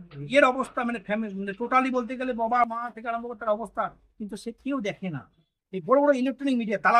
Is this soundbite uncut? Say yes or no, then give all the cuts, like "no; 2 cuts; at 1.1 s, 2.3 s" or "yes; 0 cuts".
no; 1 cut; at 5.6 s